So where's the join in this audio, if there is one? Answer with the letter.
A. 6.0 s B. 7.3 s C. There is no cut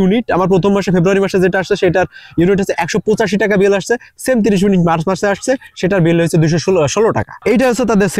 B